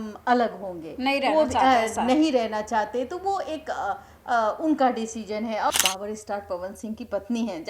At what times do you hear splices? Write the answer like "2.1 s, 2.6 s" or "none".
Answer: 5.7 s